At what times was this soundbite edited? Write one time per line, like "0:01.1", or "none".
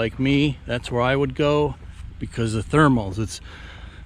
none